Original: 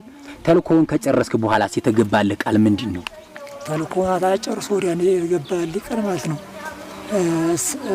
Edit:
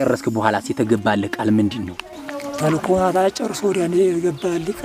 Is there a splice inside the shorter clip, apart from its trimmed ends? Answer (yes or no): no